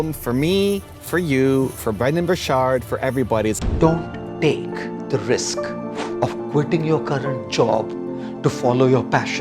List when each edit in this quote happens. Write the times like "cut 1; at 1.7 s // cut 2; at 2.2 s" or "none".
cut 1; at 3.6 s